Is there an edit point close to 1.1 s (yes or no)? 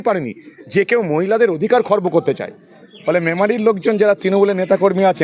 no